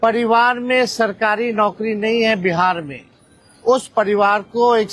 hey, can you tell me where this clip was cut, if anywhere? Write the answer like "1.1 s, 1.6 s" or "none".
none